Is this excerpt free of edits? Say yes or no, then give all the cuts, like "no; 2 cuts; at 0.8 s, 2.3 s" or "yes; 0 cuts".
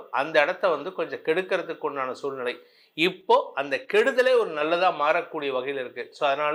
yes; 0 cuts